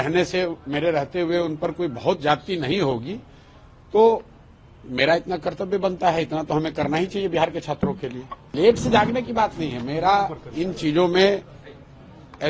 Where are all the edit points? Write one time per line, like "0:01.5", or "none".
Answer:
0:08.5